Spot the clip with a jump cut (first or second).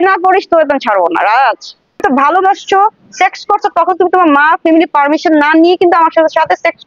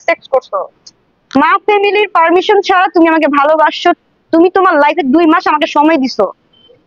first